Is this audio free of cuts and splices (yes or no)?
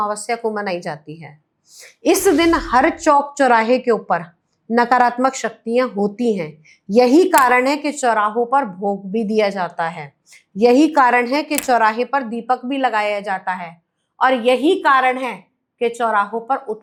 yes